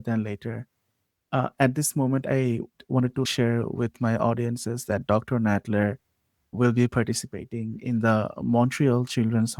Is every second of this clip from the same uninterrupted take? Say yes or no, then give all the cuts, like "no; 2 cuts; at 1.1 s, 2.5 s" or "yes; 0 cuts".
yes; 0 cuts